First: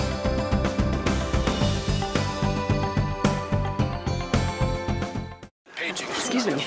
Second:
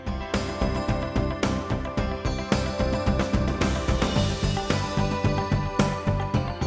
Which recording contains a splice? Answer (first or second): first